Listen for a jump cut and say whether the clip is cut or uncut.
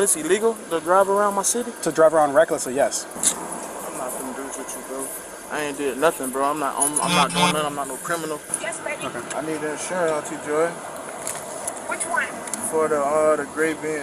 cut